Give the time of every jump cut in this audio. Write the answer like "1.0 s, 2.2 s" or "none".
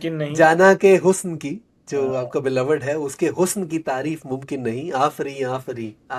none